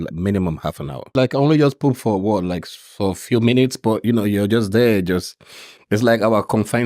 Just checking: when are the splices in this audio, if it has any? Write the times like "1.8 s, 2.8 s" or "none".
1.1 s